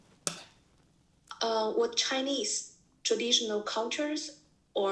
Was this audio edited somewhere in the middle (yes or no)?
no